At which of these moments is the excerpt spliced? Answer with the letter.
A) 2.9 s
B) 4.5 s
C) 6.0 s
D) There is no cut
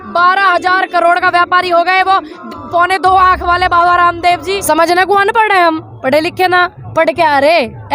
B